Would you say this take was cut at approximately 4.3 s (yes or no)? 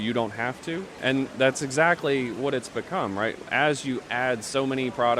no